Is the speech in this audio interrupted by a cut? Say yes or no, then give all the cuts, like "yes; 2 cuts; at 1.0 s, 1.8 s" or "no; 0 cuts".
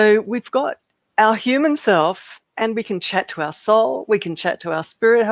no; 0 cuts